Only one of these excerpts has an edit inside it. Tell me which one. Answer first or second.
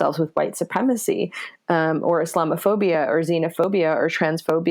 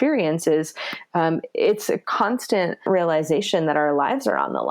second